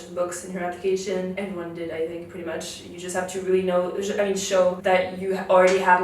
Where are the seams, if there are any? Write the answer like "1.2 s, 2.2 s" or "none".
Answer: 1.4 s, 4.8 s